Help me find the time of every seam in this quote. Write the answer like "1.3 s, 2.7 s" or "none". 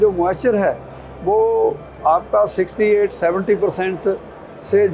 none